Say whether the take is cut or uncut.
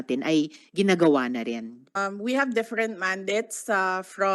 cut